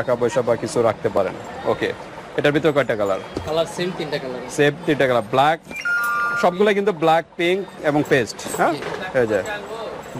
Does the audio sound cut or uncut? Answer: uncut